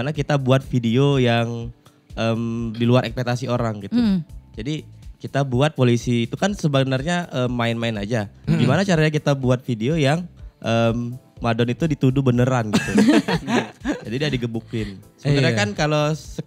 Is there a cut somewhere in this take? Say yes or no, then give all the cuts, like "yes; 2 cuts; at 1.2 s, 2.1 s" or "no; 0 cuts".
no; 0 cuts